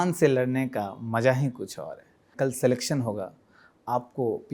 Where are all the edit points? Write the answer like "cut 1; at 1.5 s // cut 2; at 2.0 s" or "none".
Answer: cut 1; at 2.3 s